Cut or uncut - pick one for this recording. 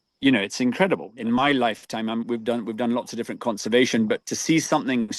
cut